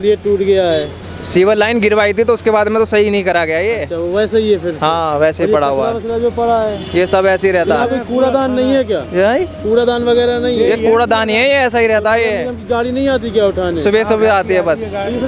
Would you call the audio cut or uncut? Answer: uncut